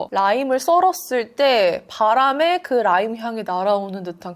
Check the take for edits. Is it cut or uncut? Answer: uncut